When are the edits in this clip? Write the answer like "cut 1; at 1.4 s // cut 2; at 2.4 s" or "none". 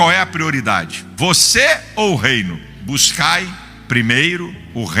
cut 1; at 1.0 s